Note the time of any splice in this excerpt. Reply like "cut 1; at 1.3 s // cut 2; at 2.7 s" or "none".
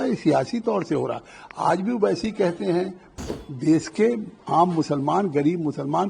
cut 1; at 3.3 s